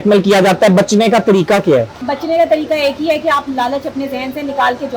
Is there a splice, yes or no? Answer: yes